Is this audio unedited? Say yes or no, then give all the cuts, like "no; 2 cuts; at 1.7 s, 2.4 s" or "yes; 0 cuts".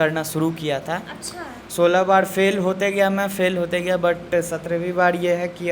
yes; 0 cuts